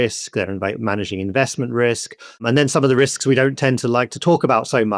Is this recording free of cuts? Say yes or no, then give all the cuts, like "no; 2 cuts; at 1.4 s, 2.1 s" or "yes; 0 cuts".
no; 1 cut; at 2.4 s